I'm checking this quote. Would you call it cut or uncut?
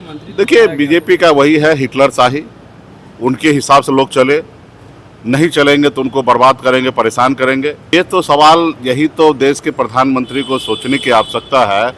cut